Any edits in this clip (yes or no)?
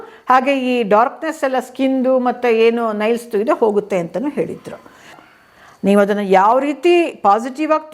yes